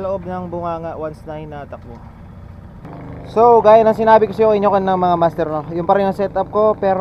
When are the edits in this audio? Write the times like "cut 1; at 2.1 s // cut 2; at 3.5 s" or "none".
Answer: cut 1; at 2.8 s

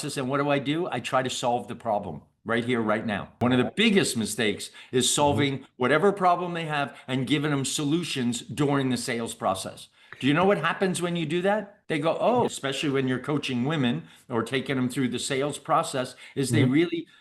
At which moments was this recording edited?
cut 1; at 12.6 s

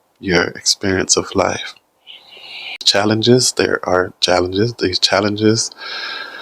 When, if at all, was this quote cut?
cut 1; at 2.8 s

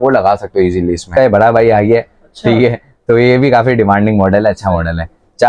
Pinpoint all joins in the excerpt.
cut 1; at 1.1 s

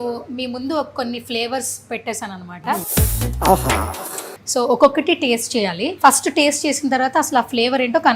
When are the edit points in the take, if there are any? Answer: cut 1; at 2.9 s // cut 2; at 4.3 s // cut 3; at 5.8 s

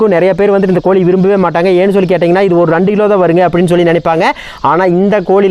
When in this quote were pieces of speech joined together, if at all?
none

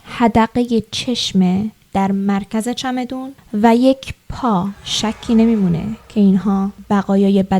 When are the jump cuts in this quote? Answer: cut 1; at 4.9 s // cut 2; at 6.8 s

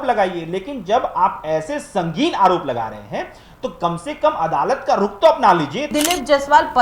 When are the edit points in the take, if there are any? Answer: cut 1; at 5.9 s

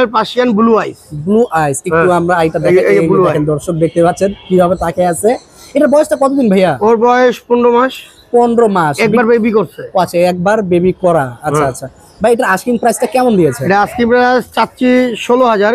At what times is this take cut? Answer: none

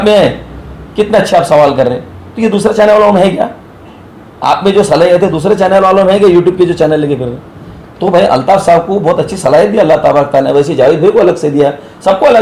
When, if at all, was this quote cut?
none

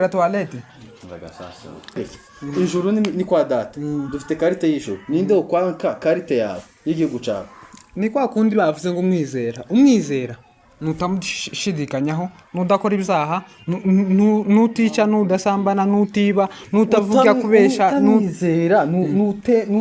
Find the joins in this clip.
cut 1; at 2.0 s

